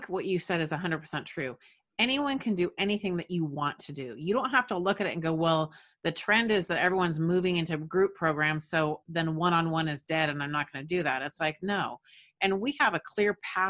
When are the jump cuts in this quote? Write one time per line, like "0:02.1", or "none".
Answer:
none